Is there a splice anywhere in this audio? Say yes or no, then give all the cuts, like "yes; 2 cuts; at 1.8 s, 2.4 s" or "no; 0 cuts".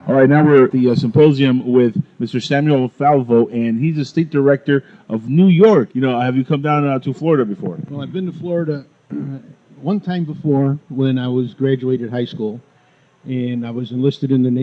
yes; 1 cut; at 9.8 s